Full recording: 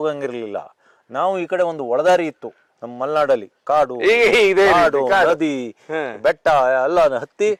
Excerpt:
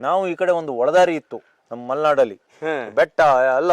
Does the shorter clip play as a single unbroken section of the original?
no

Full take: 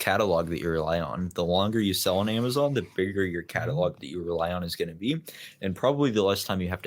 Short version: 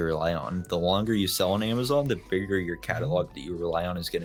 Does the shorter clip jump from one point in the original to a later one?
no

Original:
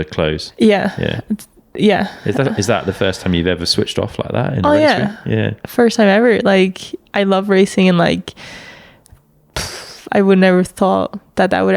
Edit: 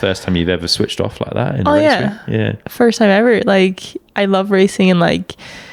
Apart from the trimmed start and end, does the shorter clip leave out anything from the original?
no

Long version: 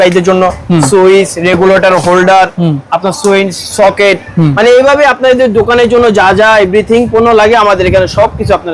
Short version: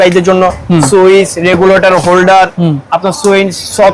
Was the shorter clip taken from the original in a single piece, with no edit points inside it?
yes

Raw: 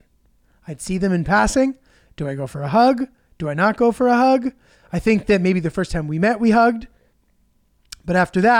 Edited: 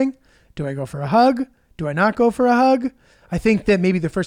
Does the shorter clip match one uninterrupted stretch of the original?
yes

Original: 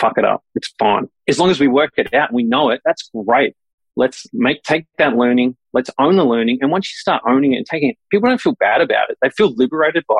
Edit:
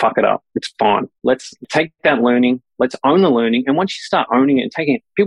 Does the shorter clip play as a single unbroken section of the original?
no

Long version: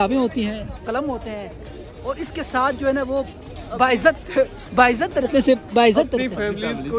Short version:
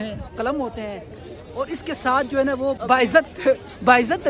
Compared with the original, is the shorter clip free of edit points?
no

